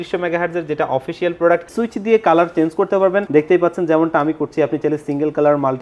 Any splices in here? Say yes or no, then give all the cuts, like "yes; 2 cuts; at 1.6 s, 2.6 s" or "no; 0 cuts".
yes; 2 cuts; at 1.7 s, 3.3 s